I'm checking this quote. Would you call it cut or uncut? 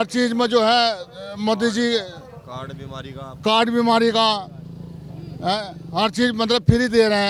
uncut